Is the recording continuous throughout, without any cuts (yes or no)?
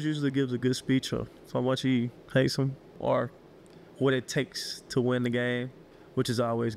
no